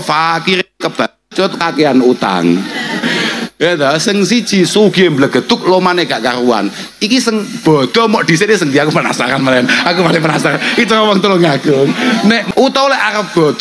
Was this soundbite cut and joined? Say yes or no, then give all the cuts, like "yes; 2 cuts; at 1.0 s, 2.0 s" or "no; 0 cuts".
yes; 1 cut; at 12.4 s